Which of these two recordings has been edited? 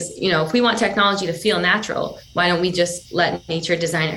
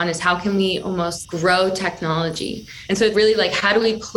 second; 2 cuts; at 1.2 s, 3.1 s

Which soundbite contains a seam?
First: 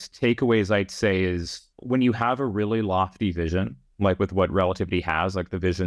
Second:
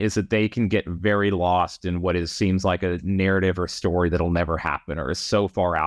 first; 2 cuts; at 1.8 s, 3.8 s

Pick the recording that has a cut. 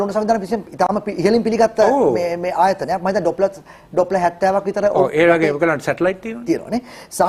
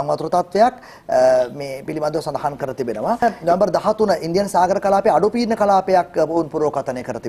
second; 1 cut; at 3.4 s

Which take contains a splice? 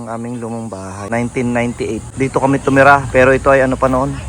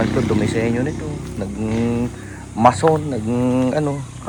first; 2 cuts; at 1.0 s, 2.1 s

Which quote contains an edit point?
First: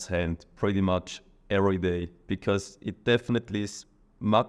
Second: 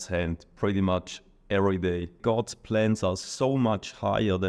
second; 1 cut; at 2.2 s

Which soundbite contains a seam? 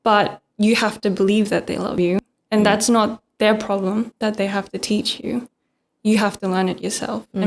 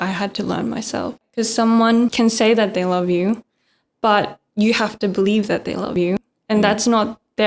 second; 2 cuts; at 1.3 s, 2.1 s

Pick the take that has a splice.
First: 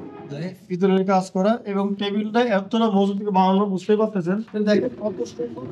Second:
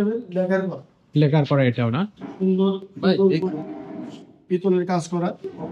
first; 1 cut; at 4.5 s

